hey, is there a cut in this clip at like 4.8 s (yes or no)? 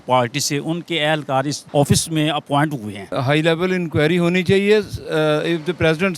no